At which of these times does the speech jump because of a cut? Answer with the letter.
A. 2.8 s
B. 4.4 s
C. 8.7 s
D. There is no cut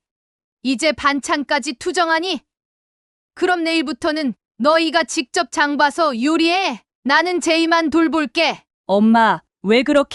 C